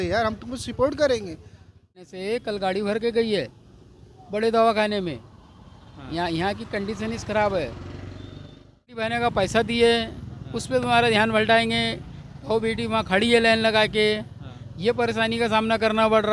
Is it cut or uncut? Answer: cut